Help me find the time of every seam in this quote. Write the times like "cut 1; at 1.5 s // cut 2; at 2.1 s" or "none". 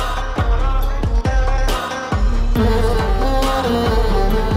none